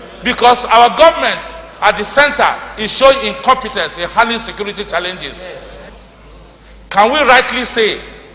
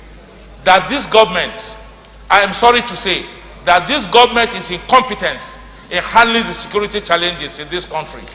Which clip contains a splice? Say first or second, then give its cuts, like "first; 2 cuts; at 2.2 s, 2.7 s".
first; 1 cut; at 5.9 s